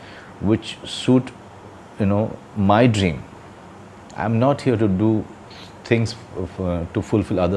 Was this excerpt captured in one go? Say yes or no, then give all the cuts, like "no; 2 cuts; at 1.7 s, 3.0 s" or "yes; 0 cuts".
yes; 0 cuts